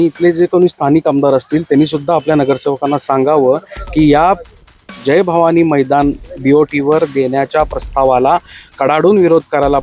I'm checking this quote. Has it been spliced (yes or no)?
no